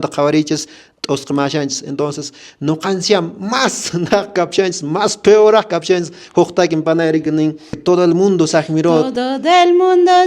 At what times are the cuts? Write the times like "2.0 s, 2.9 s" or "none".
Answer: 7.8 s, 9.1 s